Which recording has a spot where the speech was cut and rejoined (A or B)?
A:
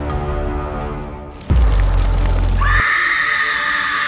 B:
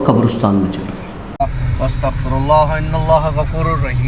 B